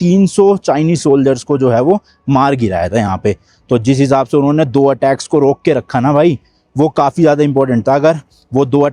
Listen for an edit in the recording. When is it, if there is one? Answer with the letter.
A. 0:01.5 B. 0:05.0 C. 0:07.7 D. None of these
D